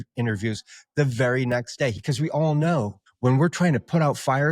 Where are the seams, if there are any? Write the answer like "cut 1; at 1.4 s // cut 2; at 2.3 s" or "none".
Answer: cut 1; at 2.0 s // cut 2; at 3.0 s